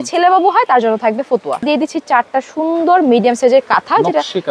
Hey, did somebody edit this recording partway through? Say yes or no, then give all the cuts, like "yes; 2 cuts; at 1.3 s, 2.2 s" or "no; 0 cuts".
yes; 1 cut; at 1.6 s